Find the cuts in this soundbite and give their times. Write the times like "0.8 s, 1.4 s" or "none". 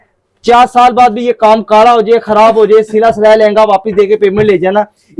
none